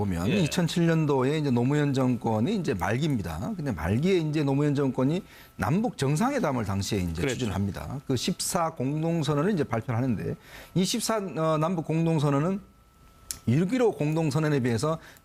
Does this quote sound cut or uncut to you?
uncut